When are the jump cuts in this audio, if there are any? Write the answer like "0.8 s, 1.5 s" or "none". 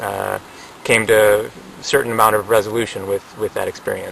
none